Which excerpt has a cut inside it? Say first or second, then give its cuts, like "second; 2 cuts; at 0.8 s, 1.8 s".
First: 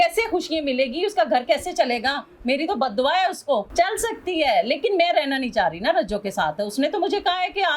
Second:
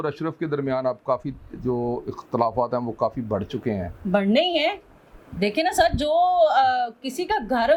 first; 1 cut; at 3.7 s